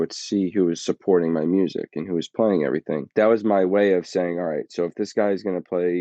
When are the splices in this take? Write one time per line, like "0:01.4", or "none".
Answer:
0:03.1